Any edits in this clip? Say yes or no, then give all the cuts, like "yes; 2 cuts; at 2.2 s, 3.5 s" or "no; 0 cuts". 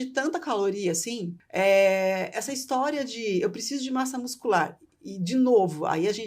yes; 1 cut; at 1.4 s